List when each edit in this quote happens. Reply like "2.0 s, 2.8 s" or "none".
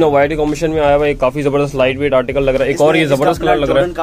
none

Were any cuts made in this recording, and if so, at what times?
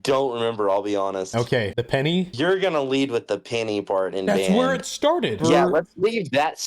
2.3 s, 5.4 s

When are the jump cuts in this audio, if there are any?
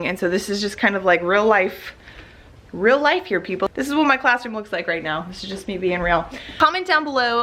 3.7 s, 6.5 s

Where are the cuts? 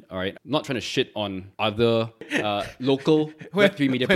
1.4 s, 2.3 s

